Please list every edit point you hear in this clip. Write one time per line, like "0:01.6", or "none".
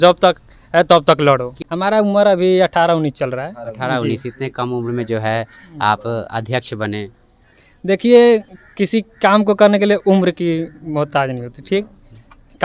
0:01.6